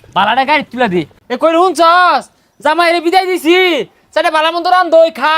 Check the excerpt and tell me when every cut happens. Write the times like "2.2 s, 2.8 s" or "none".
1.2 s